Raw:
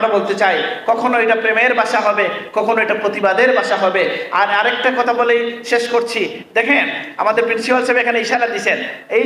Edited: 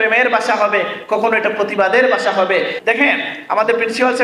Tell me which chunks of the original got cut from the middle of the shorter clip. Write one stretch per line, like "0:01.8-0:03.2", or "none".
0:04.2-0:06.4